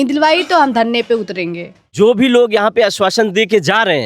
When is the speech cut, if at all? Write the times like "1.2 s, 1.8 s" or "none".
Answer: 1.9 s